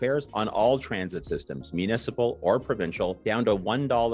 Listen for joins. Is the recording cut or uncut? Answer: uncut